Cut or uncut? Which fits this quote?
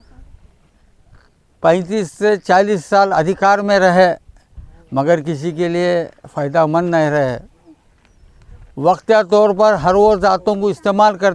uncut